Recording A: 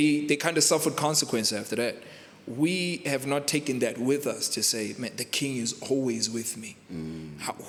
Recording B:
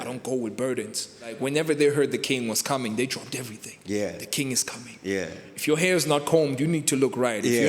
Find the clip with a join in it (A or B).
B